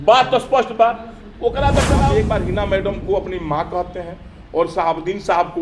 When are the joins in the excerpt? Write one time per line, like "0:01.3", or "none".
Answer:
0:02.0

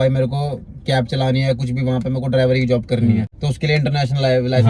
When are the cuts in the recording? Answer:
0:03.4

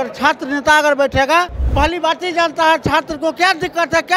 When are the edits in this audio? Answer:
0:01.6

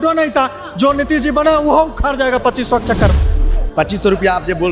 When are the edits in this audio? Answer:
0:03.3

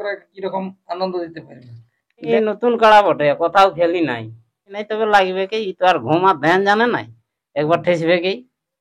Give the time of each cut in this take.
0:02.3
0:04.8

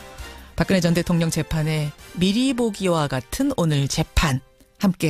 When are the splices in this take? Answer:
0:02.3

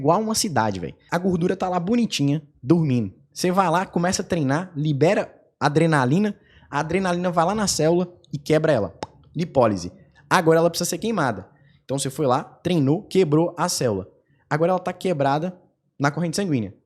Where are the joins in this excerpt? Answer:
0:00.9

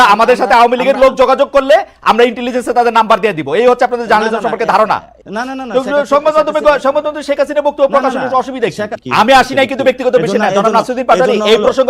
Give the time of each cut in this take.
0:05.2
0:09.0

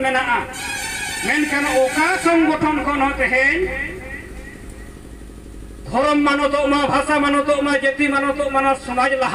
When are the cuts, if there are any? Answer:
none

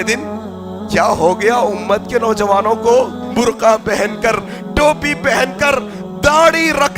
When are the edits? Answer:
0:03.2

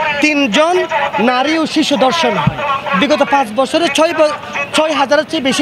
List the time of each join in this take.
none

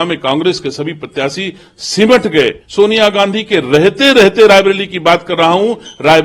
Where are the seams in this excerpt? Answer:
0:02.6

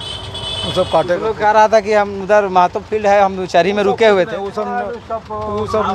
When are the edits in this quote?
none

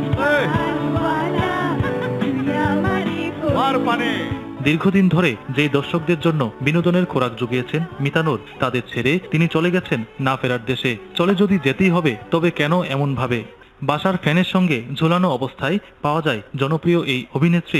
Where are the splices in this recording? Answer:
none

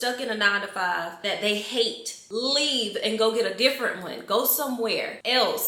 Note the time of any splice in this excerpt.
none

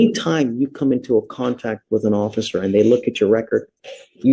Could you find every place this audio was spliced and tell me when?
none

